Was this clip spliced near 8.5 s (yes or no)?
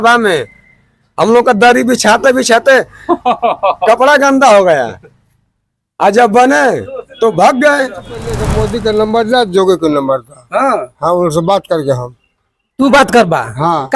yes